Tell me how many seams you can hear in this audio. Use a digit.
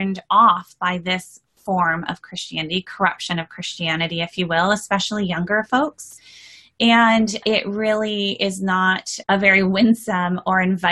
2